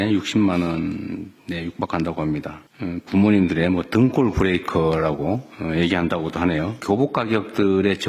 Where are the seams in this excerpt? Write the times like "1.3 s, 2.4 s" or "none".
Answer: 2.6 s, 6.8 s